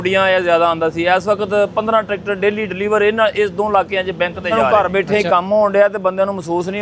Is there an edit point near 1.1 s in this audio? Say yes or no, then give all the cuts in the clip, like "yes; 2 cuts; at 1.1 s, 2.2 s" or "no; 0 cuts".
no; 1 cut; at 4.6 s